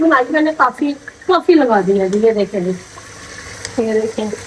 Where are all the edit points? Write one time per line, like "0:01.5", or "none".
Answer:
none